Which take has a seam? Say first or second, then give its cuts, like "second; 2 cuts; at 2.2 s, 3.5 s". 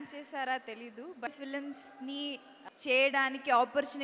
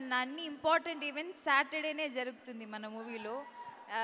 first; 2 cuts; at 1.3 s, 2.5 s